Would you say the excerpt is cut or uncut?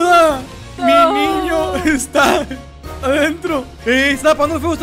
uncut